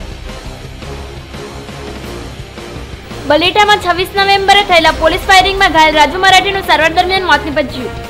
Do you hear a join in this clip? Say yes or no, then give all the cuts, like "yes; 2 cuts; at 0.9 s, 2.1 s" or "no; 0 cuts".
yes; 1 cut; at 3.2 s